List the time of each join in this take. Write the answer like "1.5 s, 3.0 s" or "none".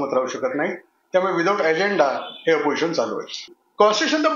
3.3 s

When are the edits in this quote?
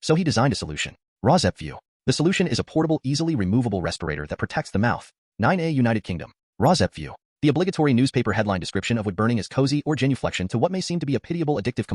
5.2 s

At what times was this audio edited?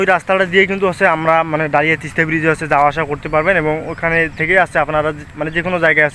none

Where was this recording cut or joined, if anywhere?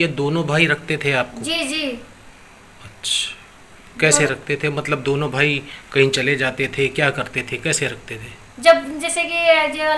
7.5 s

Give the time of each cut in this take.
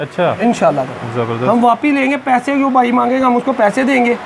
none

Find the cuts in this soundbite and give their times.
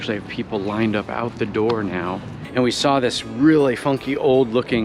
2.3 s

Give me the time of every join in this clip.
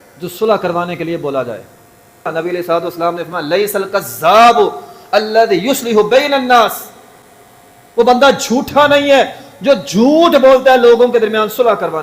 2.3 s

